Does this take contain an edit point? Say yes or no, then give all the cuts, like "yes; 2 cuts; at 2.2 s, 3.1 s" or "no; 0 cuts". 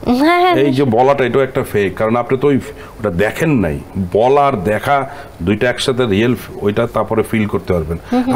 no; 0 cuts